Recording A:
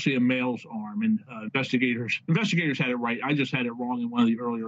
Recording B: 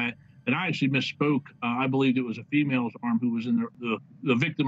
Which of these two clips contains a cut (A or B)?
B